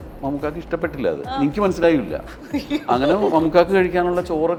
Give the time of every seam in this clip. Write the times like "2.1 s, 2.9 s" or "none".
none